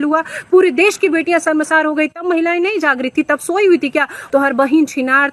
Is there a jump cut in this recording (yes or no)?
yes